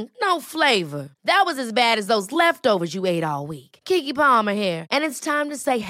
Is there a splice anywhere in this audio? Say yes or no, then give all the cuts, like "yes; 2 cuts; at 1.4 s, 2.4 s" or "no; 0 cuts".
no; 0 cuts